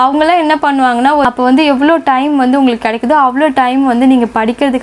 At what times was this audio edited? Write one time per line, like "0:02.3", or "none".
0:01.2